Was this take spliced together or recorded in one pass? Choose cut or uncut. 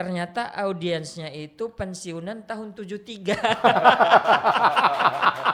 uncut